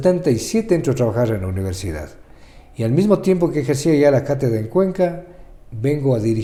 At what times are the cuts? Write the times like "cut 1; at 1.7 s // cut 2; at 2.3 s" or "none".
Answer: none